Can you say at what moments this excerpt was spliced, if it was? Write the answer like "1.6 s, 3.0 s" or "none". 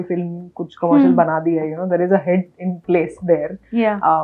none